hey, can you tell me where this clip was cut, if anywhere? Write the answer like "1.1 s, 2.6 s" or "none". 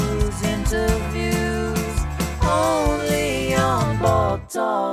none

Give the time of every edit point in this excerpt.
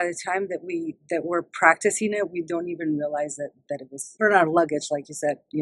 4.1 s

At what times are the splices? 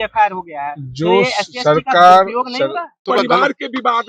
3.0 s

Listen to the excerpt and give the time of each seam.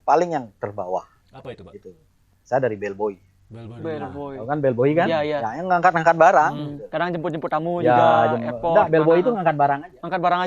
none

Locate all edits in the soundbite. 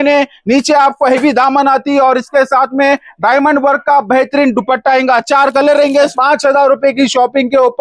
6.1 s

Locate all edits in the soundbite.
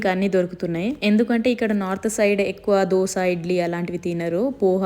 1.0 s

